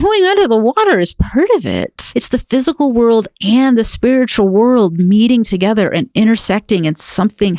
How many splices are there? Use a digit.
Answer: 1